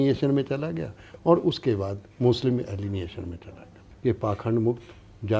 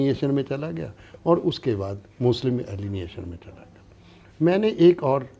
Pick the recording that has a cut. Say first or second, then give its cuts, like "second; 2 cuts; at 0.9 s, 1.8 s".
first; 1 cut; at 3.8 s